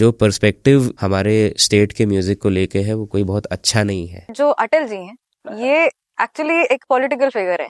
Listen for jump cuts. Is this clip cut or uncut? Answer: cut